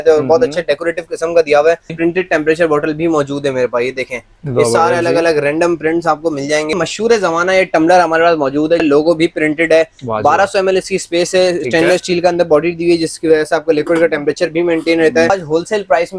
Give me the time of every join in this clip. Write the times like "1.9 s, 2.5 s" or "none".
1.9 s, 6.7 s, 8.8 s, 15.3 s